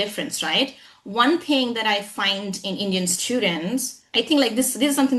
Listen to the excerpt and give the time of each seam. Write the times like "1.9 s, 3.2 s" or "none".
none